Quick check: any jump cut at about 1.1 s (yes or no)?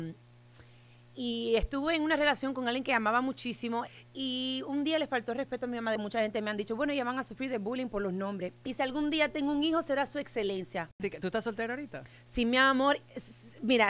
no